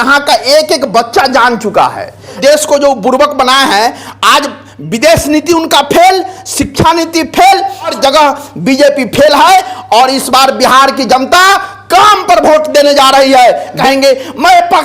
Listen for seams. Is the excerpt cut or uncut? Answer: cut